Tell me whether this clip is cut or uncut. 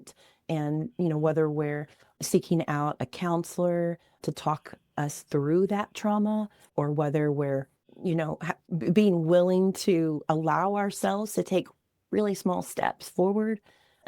cut